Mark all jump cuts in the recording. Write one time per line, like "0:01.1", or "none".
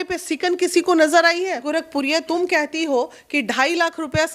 0:01.6